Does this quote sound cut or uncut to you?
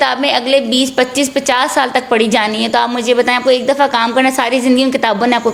uncut